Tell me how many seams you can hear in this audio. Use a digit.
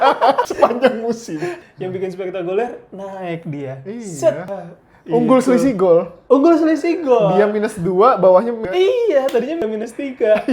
1